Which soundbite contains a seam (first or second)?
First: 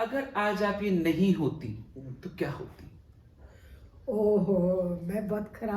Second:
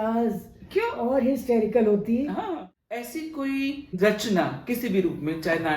second